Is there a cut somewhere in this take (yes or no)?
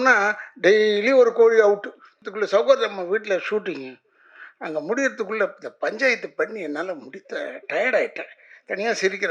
yes